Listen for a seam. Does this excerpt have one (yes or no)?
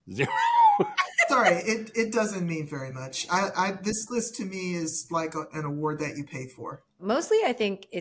yes